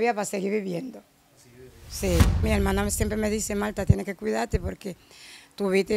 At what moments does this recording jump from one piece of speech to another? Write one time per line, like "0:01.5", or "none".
0:02.4